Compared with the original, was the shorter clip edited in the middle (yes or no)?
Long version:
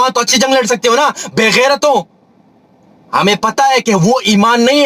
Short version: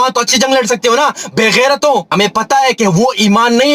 yes